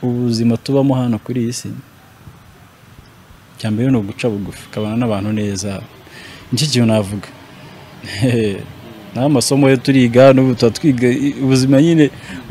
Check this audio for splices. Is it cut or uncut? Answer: uncut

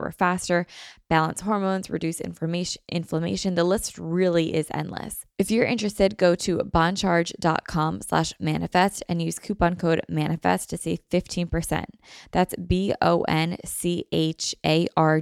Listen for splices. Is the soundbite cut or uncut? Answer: cut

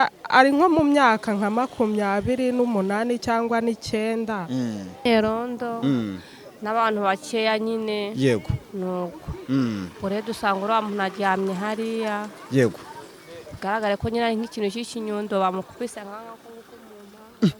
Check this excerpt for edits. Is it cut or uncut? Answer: cut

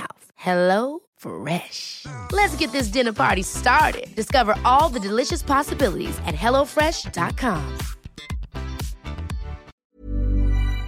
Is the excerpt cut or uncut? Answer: cut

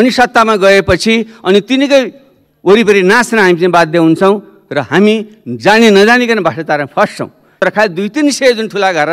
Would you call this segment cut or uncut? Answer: cut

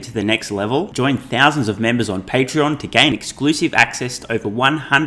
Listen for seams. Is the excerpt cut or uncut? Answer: uncut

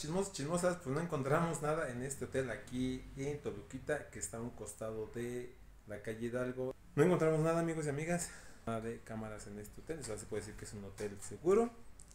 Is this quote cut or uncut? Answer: cut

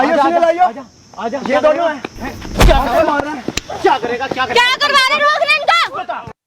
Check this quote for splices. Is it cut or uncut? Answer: uncut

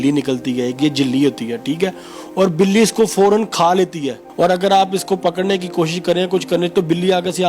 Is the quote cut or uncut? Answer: cut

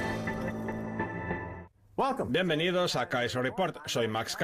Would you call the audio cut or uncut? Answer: cut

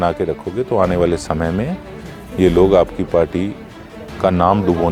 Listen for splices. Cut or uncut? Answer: uncut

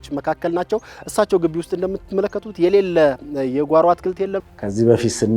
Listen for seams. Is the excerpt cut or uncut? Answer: cut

